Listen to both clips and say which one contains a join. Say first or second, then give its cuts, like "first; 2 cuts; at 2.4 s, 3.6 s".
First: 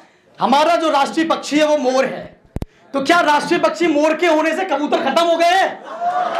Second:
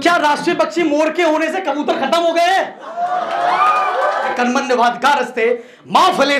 second; 1 cut; at 4.3 s